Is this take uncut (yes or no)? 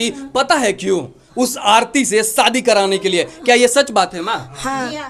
yes